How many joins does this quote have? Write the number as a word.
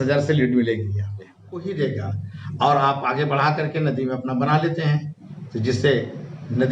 one